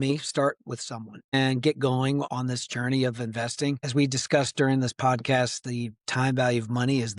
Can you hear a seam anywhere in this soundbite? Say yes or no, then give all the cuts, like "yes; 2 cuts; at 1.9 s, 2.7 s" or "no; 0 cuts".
yes; 3 cuts; at 1.3 s, 2.3 s, 3.8 s